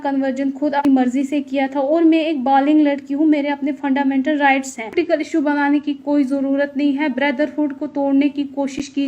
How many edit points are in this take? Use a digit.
2